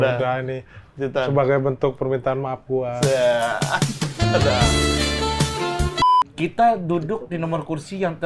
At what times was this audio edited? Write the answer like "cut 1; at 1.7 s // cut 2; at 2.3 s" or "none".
cut 1; at 6.0 s